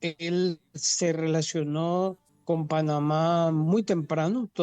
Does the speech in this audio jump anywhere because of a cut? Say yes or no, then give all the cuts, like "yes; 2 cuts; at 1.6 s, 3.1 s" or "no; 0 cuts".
yes; 1 cut; at 2.3 s